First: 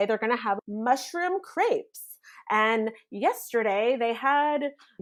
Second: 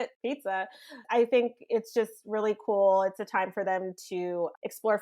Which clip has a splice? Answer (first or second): second